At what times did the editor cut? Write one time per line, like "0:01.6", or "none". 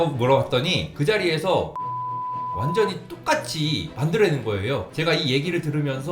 0:04.9